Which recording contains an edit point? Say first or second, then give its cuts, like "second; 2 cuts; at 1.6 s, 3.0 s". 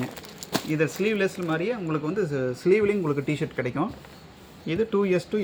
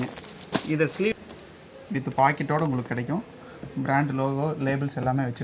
second; 1 cut; at 1.1 s